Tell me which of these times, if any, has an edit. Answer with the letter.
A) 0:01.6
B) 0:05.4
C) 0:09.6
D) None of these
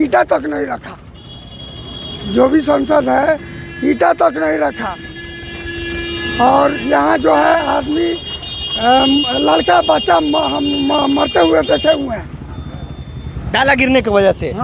D